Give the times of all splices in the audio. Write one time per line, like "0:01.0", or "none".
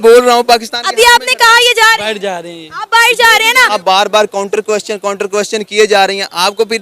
0:03.8